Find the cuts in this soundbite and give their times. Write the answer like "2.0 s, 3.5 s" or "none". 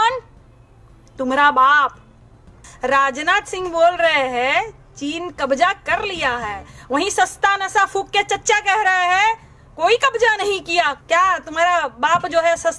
2.6 s, 11.0 s